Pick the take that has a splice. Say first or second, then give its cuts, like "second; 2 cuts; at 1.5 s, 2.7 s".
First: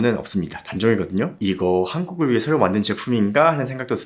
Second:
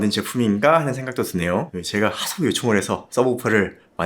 first; 1 cut; at 1.4 s